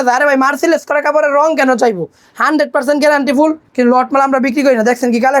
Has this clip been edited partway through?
yes; 1 cut; at 3.6 s

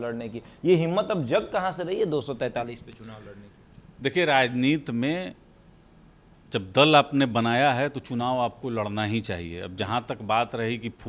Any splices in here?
no; 0 cuts

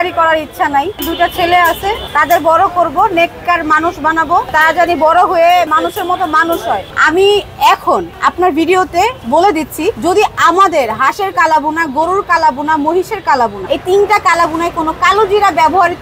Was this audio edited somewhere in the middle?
yes; 5 cuts; at 1.1 s, 5.7 s, 6.9 s, 10.0 s, 13.6 s

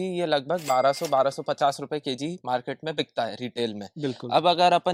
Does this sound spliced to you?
no; 0 cuts

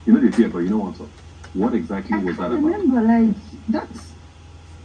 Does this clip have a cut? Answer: no; 0 cuts

